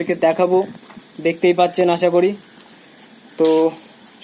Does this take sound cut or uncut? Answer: uncut